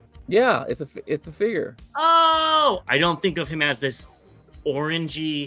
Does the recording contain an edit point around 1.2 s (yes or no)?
no